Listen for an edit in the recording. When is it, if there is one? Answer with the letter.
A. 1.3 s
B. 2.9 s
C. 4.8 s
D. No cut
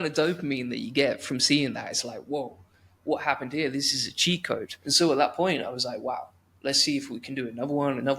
C